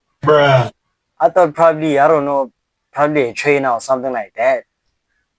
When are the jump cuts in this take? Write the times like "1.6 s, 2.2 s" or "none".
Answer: 1.1 s